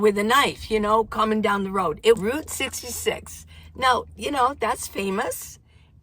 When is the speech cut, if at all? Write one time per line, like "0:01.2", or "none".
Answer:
0:02.2